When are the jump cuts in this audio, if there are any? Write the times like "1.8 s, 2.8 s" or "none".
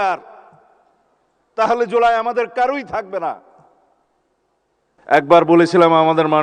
5.0 s